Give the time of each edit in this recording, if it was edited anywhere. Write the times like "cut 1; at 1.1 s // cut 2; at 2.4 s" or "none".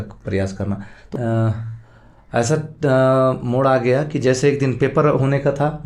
cut 1; at 1.0 s